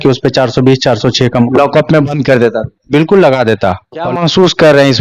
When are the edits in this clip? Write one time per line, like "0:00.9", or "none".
0:04.1